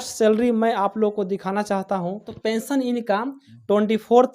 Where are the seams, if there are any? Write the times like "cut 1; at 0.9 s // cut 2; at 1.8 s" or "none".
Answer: cut 1; at 2.3 s